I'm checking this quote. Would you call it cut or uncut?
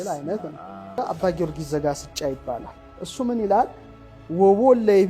cut